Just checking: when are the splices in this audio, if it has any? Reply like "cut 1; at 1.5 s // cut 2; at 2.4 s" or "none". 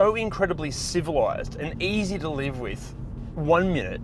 none